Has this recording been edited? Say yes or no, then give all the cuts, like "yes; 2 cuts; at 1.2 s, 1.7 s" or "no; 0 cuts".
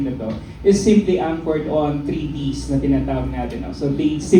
no; 0 cuts